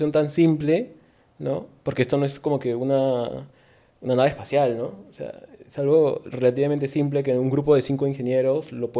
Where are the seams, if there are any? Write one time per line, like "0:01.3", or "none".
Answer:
none